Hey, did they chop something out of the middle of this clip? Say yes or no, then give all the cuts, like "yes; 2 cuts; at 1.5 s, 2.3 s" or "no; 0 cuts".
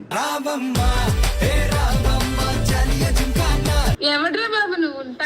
yes; 1 cut; at 4.0 s